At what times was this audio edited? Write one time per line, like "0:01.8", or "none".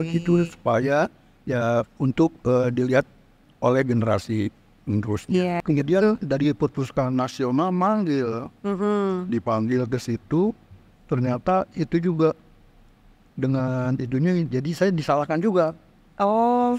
0:05.6